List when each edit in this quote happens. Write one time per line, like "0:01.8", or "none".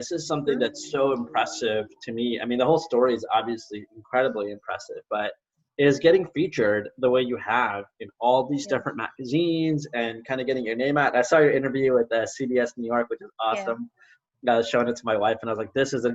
none